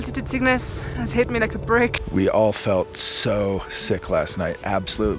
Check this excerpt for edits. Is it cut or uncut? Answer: uncut